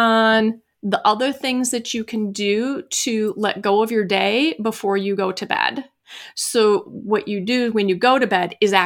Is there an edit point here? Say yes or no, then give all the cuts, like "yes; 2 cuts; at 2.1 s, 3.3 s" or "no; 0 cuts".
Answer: no; 0 cuts